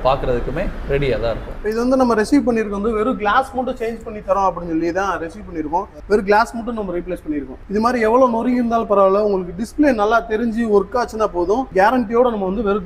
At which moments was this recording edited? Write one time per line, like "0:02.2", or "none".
0:01.5
0:06.0
0:11.7